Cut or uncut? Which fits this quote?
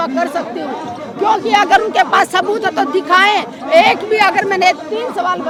uncut